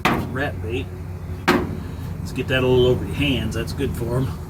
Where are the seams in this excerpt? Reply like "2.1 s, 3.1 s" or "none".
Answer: none